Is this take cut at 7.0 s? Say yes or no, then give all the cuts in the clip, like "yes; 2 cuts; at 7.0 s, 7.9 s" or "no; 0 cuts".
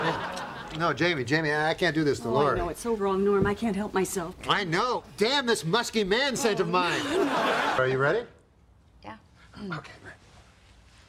no; 1 cut; at 4.6 s